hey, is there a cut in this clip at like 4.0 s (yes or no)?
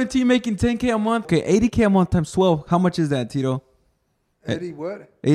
no